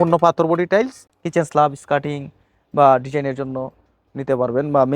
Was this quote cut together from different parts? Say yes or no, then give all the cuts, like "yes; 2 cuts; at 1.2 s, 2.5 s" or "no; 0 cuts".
yes; 1 cut; at 1.0 s